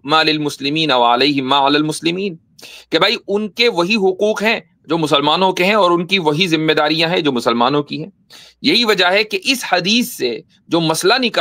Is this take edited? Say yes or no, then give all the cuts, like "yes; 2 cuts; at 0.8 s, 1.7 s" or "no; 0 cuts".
no; 0 cuts